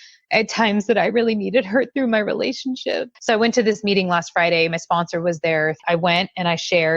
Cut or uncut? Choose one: cut